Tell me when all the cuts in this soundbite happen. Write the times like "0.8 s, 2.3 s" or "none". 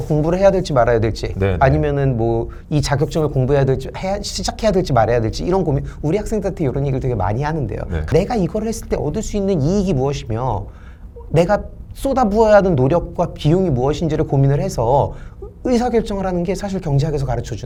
none